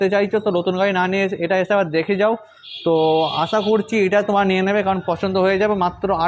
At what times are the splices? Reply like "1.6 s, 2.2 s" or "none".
none